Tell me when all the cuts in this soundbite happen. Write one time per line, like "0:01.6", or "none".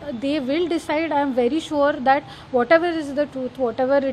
none

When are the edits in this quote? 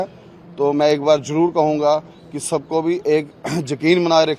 none

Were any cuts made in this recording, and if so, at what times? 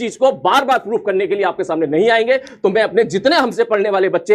none

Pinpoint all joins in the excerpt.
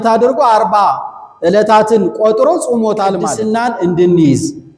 0:03.4

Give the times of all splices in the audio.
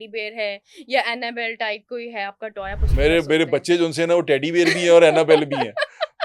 none

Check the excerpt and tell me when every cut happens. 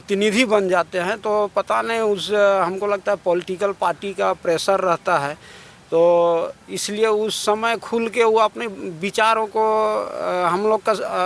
none

